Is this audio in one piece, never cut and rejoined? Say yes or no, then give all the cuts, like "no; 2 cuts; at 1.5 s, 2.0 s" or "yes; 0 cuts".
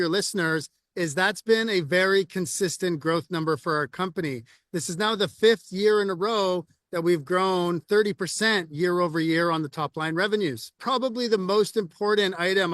no; 1 cut; at 10.8 s